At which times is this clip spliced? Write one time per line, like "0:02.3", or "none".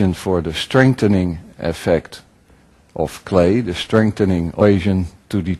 none